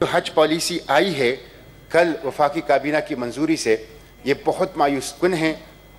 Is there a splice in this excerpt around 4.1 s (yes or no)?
no